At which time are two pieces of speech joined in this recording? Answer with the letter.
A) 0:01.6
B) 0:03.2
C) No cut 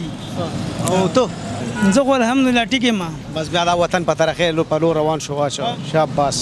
A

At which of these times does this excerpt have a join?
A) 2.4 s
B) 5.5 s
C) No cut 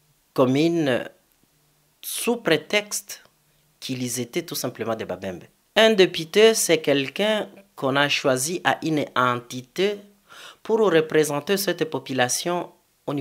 B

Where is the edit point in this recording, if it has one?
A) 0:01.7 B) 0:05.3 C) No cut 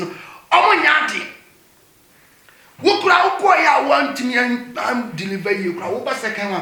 C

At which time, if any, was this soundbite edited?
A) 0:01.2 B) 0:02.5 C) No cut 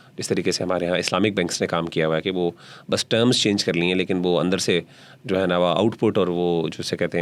C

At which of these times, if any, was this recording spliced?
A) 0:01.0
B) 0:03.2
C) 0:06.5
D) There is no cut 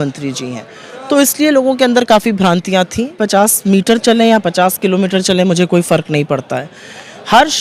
B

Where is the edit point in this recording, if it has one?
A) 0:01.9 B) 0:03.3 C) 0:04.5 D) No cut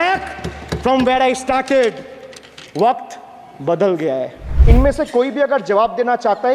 C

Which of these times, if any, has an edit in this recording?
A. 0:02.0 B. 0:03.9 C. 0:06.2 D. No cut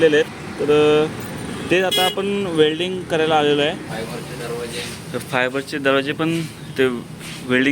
B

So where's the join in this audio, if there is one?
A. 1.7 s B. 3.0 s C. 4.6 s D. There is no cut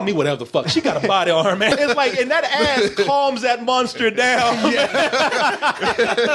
A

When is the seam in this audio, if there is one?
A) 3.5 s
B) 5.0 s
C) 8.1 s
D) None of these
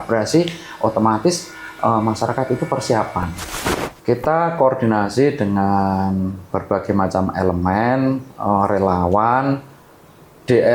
A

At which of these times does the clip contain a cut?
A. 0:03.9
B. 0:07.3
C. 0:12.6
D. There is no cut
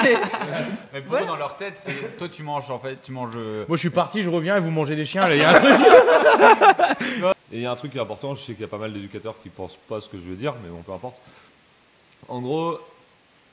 B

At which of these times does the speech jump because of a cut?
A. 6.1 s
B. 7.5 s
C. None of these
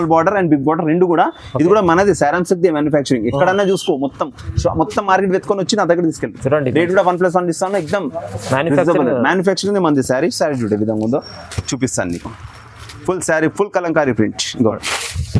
C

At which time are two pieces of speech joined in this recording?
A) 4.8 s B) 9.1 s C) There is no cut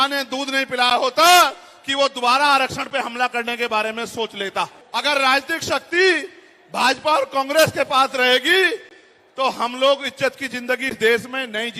A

